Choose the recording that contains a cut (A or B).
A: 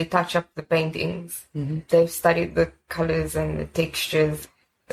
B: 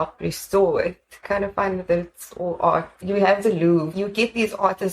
B